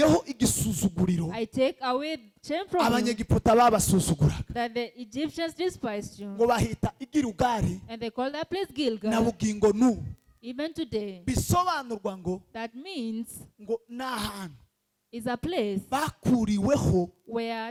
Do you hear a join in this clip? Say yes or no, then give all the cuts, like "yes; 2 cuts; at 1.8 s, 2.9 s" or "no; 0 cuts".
no; 0 cuts